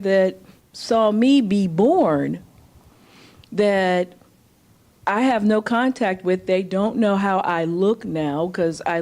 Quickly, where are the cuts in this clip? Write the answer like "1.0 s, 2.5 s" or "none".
5.4 s

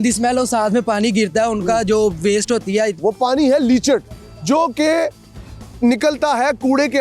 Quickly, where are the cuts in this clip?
3.0 s

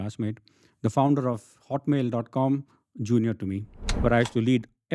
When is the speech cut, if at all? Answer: 3.9 s

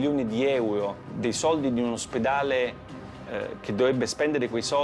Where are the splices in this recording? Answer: 1.0 s

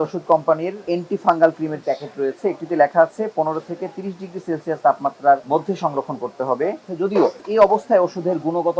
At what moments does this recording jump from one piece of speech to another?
1.0 s, 1.8 s, 5.4 s, 7.1 s

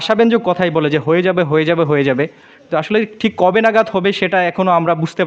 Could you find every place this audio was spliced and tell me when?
none

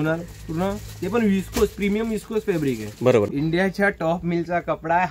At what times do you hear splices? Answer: 3.3 s

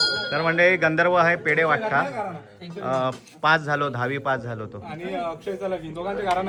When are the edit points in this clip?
none

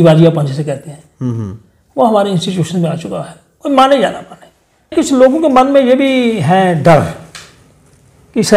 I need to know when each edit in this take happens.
4.9 s

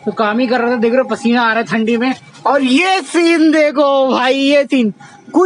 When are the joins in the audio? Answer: none

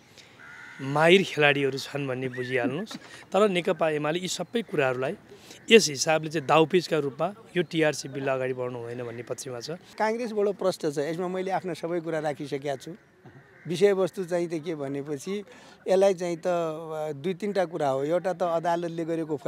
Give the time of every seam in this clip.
10.0 s

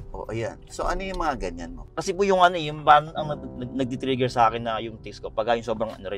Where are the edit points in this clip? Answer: 1.8 s

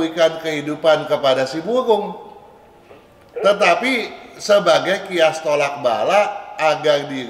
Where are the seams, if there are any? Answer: none

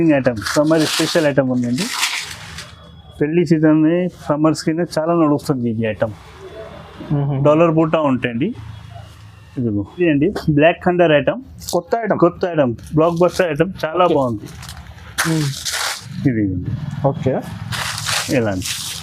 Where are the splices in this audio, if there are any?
9.9 s

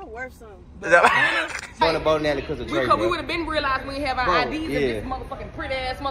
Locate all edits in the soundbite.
1.8 s

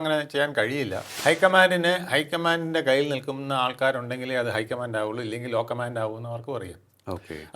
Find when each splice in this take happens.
1.1 s

